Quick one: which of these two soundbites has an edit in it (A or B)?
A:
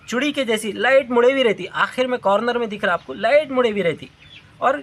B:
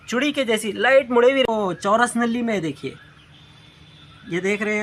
B